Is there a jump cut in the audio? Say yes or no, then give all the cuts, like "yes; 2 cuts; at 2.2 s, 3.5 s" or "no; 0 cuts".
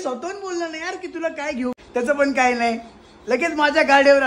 yes; 1 cut; at 1.8 s